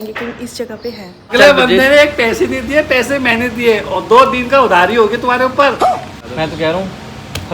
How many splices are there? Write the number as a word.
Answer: two